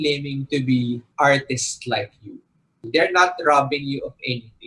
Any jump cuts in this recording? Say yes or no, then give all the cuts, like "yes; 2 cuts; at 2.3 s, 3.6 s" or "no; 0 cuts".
yes; 2 cuts; at 1.1 s, 2.9 s